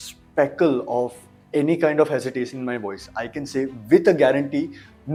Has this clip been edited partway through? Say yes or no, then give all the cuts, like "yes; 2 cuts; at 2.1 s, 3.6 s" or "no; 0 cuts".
no; 0 cuts